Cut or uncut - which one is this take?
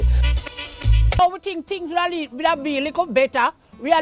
cut